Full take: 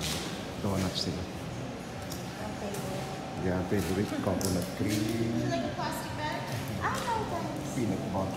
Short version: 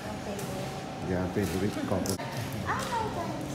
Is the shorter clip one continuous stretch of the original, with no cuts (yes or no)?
no